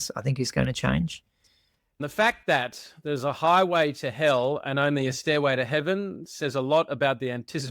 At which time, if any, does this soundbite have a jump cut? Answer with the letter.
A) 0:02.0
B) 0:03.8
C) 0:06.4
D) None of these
A